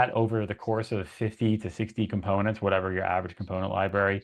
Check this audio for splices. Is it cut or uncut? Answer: uncut